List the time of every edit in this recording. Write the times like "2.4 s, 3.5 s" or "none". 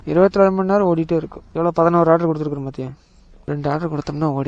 1.4 s, 3.5 s